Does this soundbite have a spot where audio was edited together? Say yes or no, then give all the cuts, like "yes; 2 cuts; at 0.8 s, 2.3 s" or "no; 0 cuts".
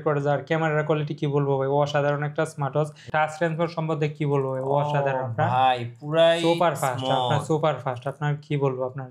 yes; 1 cut; at 3.0 s